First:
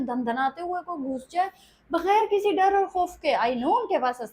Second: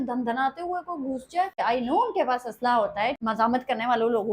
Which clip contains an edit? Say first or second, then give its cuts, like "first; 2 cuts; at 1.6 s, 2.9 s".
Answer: second; 2 cuts; at 1.6 s, 3.2 s